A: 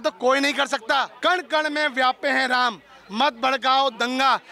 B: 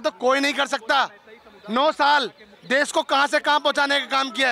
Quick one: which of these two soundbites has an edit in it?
A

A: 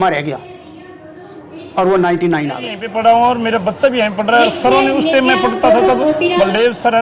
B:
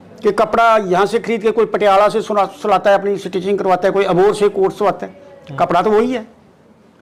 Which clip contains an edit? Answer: A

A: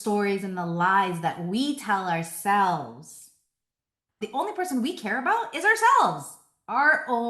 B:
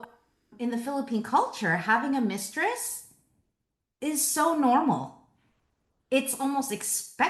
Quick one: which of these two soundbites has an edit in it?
A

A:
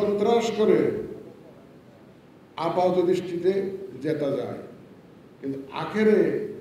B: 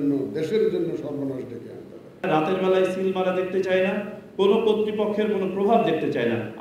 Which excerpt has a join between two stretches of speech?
B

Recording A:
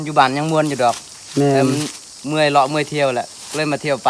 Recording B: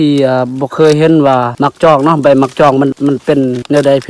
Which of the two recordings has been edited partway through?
B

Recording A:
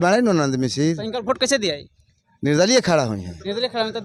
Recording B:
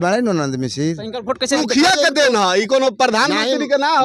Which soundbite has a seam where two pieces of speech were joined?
B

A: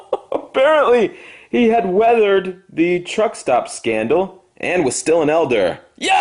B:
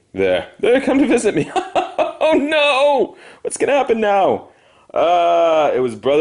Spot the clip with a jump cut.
A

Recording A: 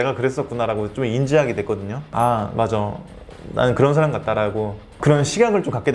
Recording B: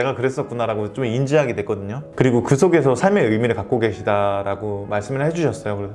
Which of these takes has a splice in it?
A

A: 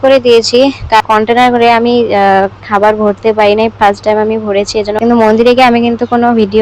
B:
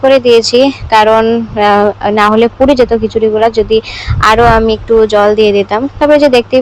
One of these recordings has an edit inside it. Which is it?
A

